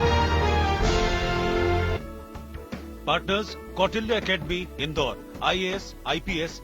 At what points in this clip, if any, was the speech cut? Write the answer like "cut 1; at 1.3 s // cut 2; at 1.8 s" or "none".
cut 1; at 0.9 s